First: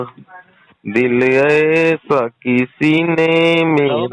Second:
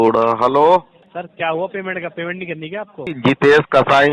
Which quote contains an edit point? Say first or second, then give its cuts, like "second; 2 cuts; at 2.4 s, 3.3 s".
second; 2 cuts; at 1.0 s, 3.1 s